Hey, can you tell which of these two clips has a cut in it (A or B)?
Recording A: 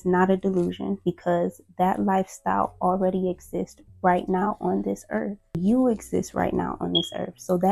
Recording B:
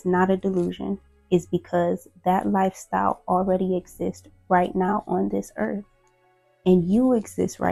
A